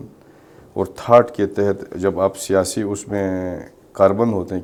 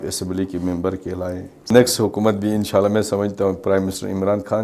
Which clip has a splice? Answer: second; 1 cut; at 1.7 s

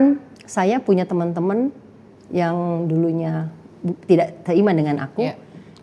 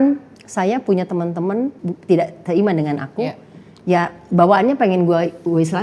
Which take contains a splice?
second; 1 cut; at 1.9 s

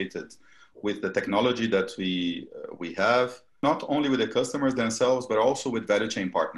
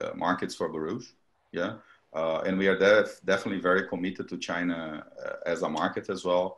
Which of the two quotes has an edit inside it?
first; 1 cut; at 3.6 s

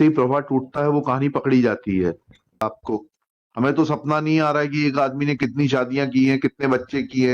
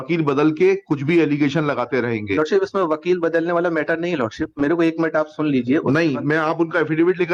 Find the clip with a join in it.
first; 1 cut; at 2.6 s

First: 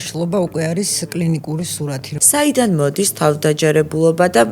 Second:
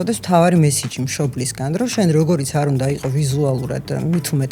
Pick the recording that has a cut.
first; 1 cut; at 2.1 s

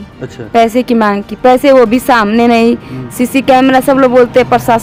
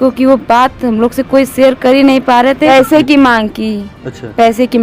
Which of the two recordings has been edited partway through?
second; 1 cut; at 2.7 s

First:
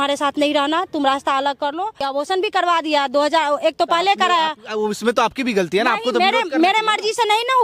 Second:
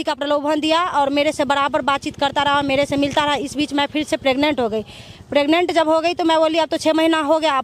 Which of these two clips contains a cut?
first; 1 cut; at 2.1 s

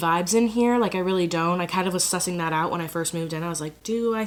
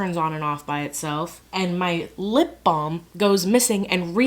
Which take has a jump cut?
second; 1 cut; at 1.4 s

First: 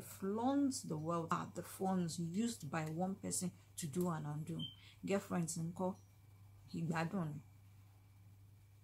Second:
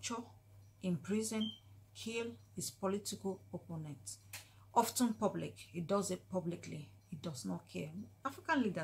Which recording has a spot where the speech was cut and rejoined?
first; 1 cut; at 1.3 s

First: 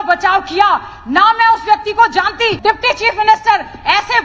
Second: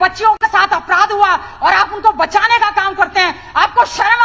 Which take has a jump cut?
first; 1 cut; at 2.6 s

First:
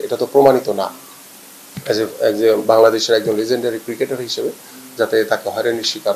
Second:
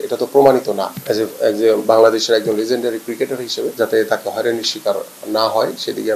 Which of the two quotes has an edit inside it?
second; 2 cuts; at 0.9 s, 3.7 s

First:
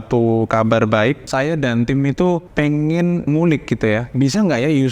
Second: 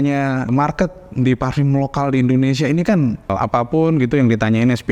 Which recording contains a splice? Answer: first; 3 cuts; at 1.3 s, 2.7 s, 4.1 s

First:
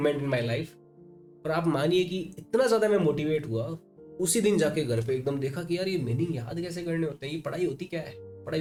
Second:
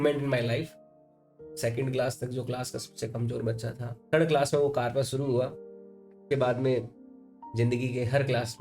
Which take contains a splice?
second; 2 cuts; at 1.3 s, 3.9 s

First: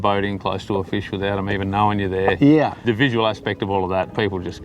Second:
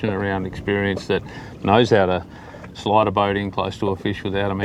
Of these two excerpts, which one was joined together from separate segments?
first; 1 cut; at 2.8 s

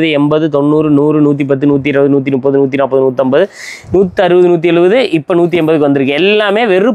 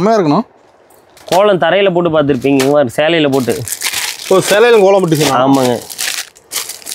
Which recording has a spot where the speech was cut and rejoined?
second; 1 cut; at 1.2 s

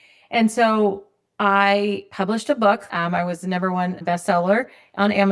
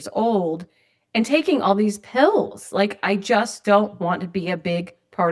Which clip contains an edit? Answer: first; 2 cuts; at 2.1 s, 4.0 s

